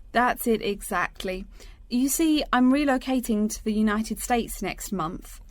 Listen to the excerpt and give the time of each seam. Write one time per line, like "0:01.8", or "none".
none